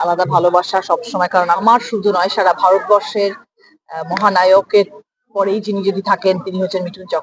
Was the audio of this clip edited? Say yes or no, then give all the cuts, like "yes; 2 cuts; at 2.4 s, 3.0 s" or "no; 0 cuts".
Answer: yes; 1 cut; at 1.6 s